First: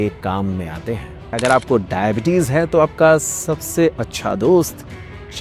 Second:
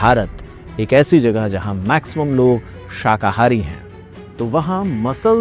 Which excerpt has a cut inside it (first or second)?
first